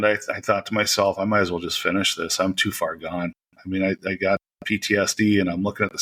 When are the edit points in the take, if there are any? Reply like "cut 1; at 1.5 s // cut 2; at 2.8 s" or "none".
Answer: none